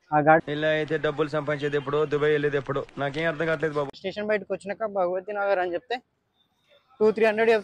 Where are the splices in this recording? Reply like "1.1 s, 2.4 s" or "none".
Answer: 4.0 s